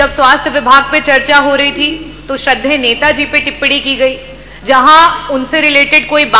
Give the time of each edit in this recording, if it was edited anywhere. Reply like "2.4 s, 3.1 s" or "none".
none